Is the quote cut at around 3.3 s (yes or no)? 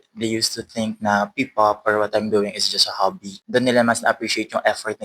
yes